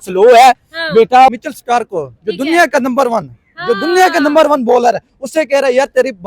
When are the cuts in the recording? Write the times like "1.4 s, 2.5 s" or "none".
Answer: 1.3 s

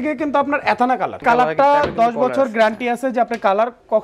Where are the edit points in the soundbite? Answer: 1.2 s

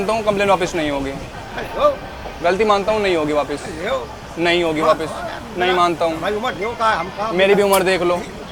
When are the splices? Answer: none

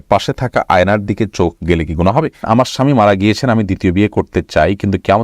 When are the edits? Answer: 2.4 s

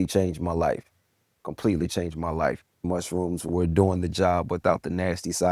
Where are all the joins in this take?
2.8 s

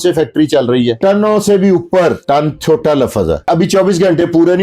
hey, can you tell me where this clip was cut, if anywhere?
1.0 s, 2.2 s, 3.5 s

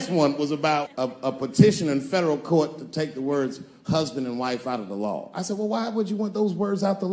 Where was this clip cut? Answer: 1.0 s

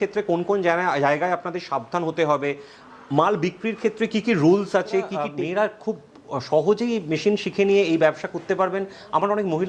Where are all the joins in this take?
5.2 s

